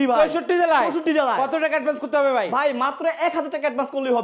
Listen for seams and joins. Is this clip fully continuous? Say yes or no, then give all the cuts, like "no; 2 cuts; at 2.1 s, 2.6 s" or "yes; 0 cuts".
yes; 0 cuts